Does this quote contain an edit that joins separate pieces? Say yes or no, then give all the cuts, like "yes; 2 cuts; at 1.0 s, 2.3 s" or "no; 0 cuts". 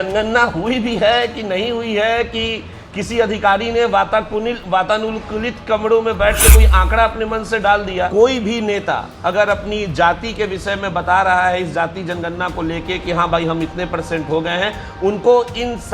yes; 1 cut; at 8.1 s